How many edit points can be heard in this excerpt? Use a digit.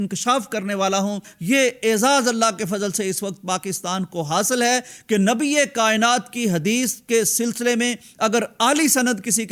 1